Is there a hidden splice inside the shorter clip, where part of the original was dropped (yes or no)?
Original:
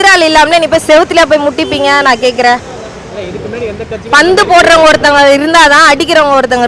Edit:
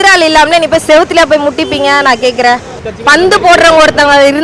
yes